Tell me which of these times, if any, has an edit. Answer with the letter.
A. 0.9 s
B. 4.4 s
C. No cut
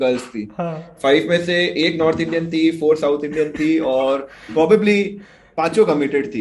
C